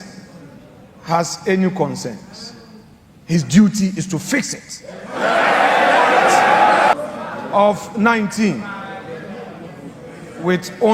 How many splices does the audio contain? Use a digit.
1